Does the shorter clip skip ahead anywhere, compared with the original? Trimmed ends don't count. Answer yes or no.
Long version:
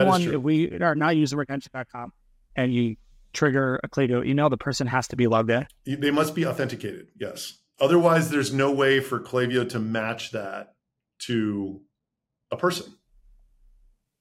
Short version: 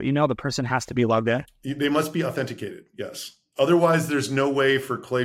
no